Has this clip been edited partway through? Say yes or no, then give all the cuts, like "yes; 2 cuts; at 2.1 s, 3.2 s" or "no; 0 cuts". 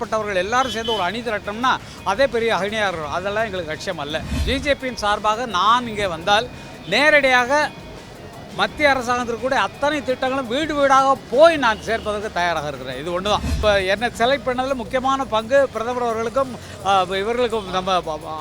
yes; 2 cuts; at 4.4 s, 13.6 s